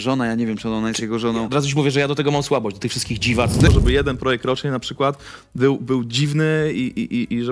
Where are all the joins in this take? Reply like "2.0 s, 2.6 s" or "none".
3.7 s